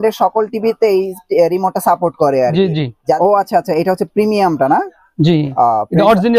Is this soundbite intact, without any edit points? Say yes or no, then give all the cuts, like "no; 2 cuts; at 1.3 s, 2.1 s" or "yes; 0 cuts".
no; 1 cut; at 3.2 s